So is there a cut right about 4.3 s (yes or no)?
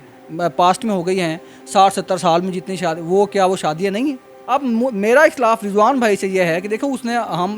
yes